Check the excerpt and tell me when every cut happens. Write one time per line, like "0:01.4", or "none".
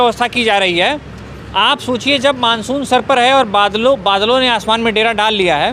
none